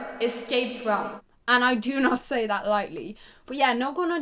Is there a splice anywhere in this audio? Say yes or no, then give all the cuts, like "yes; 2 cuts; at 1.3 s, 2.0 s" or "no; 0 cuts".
no; 0 cuts